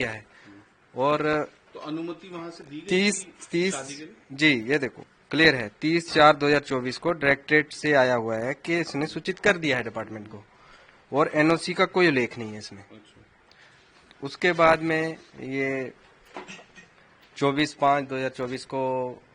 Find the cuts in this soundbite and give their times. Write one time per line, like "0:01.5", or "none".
none